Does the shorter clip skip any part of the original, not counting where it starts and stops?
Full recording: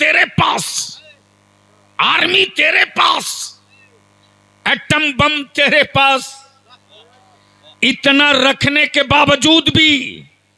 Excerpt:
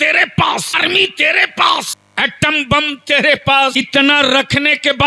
yes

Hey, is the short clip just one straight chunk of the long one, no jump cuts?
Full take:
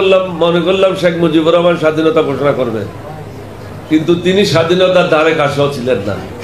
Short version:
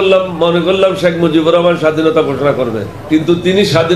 no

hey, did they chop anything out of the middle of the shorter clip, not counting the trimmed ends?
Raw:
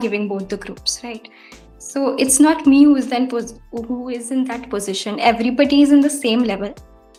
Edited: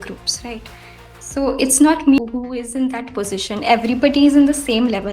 yes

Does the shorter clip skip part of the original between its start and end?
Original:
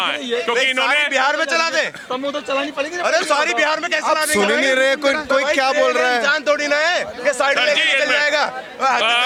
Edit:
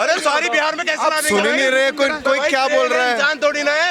no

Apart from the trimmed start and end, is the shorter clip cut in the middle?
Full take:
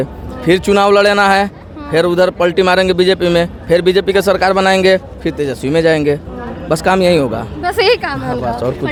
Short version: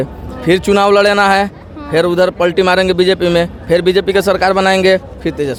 no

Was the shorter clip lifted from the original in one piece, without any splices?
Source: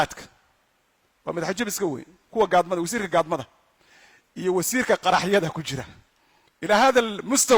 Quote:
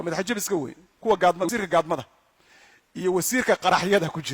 no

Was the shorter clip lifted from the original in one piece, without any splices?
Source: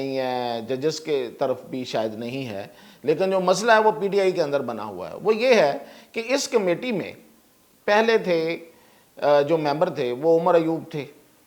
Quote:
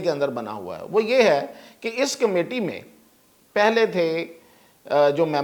yes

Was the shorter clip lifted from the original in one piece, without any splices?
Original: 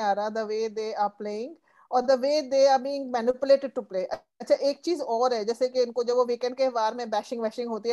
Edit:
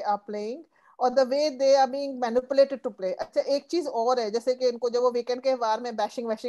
no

